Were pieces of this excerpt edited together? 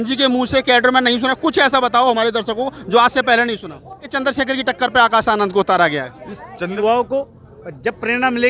yes; 2 cuts; at 4.1 s, 6.7 s

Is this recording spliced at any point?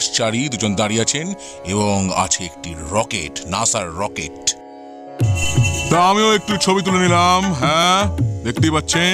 no; 0 cuts

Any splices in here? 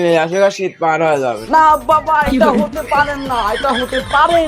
yes; 1 cut; at 1.4 s

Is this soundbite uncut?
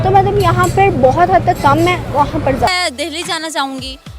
no; 1 cut; at 2.7 s

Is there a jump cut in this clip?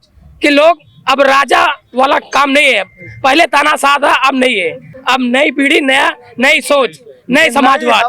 no; 0 cuts

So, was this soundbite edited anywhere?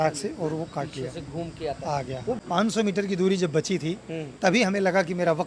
yes; 1 cut; at 2.4 s

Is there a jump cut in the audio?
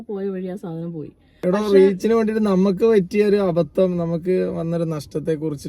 yes; 1 cut; at 1.2 s

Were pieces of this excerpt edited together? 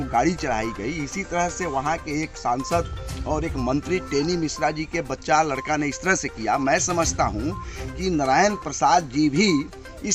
no; 0 cuts

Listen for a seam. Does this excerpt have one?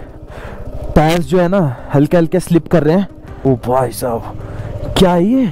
yes; 1 cut; at 3.2 s

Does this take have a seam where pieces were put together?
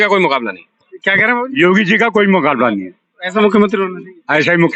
no; 0 cuts

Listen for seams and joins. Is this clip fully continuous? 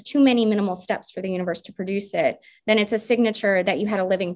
yes; 0 cuts

